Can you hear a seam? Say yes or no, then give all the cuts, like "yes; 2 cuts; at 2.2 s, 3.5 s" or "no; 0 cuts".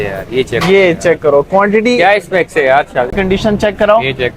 yes; 1 cut; at 3.1 s